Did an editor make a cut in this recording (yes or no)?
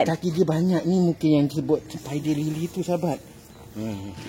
no